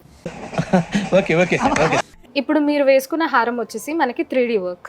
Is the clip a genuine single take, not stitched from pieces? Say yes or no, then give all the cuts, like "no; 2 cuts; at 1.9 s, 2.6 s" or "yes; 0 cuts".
no; 1 cut; at 2.2 s